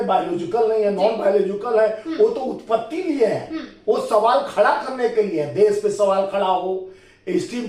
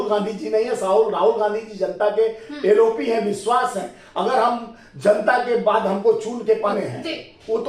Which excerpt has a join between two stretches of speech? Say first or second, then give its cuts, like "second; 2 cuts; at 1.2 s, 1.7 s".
second; 1 cut; at 6.7 s